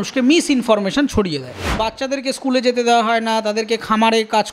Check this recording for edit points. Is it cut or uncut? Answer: cut